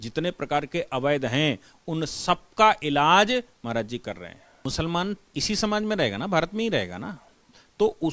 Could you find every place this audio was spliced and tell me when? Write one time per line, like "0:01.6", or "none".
0:04.7